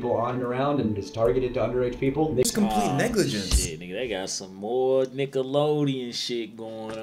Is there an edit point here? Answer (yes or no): yes